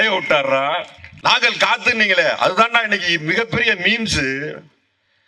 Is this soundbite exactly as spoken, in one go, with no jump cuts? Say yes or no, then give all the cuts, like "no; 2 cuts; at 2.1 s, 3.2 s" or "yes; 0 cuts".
no; 1 cut; at 1.0 s